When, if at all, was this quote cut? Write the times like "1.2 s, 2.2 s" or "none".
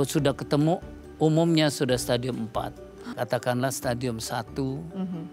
3.0 s